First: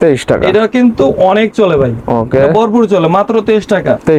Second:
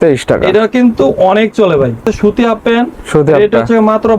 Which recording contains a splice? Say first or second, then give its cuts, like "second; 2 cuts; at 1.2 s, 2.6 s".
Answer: second; 1 cut; at 2.0 s